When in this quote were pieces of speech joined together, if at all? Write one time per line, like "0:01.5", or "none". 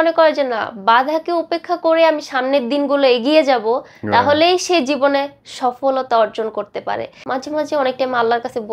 0:07.2